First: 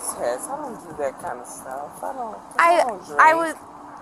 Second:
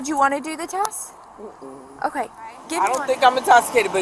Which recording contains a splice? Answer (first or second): second